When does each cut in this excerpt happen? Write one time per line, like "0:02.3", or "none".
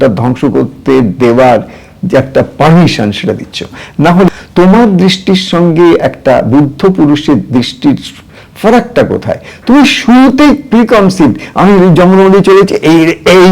0:04.3